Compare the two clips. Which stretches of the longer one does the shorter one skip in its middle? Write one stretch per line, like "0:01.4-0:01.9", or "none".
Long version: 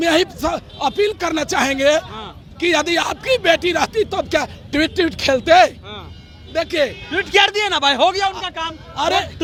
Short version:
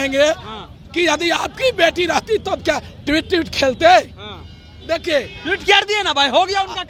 none